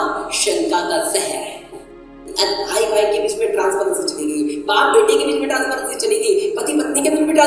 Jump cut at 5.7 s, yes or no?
no